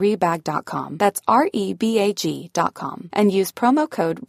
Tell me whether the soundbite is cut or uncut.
uncut